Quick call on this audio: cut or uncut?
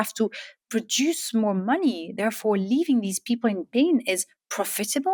uncut